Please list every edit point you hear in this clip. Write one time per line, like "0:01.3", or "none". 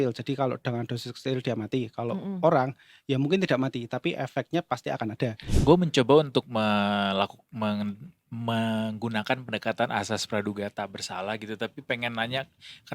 0:05.5